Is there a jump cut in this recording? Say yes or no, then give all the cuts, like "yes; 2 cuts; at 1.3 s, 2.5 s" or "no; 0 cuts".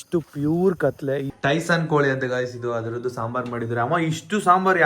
yes; 1 cut; at 1.3 s